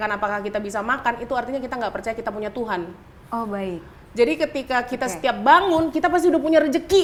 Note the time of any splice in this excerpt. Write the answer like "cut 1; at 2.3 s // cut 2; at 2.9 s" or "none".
none